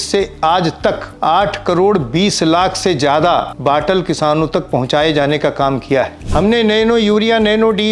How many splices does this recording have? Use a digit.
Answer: 3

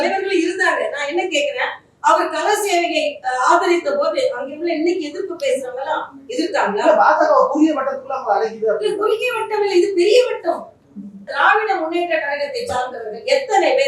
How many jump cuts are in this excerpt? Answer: 1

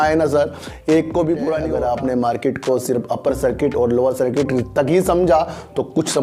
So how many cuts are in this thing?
1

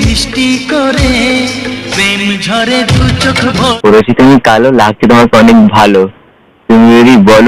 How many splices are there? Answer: 1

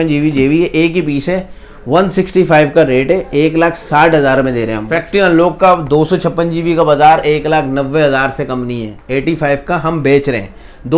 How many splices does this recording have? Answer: 2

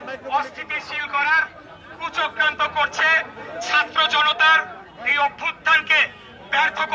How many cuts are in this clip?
0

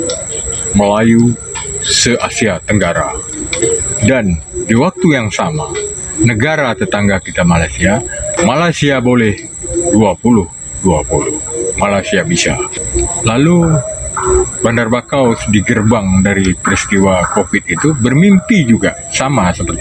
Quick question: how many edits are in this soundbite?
3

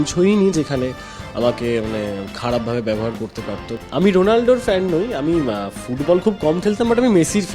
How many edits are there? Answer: 1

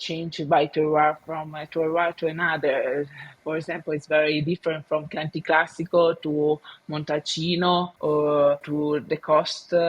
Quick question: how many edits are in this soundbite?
2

